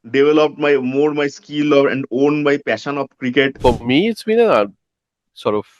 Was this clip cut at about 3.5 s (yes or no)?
yes